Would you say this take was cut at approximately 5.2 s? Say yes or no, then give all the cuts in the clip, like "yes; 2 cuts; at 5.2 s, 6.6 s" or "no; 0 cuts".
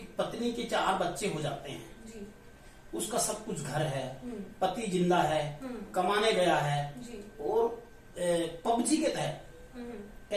no; 0 cuts